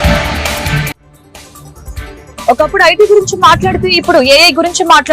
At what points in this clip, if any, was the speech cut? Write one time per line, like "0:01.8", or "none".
0:02.4